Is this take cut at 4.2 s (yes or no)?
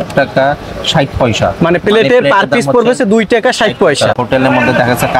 yes